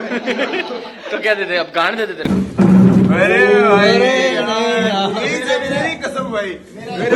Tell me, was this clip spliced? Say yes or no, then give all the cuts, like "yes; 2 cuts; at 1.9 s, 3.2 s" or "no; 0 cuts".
yes; 1 cut; at 2.3 s